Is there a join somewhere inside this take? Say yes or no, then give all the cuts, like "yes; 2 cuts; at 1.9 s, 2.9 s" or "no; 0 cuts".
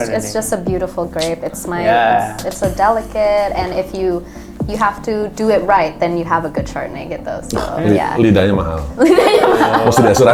no; 0 cuts